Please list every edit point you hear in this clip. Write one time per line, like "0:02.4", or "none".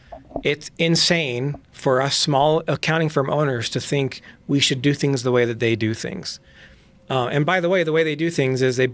none